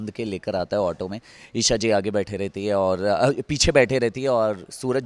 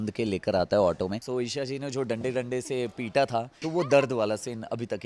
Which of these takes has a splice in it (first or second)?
second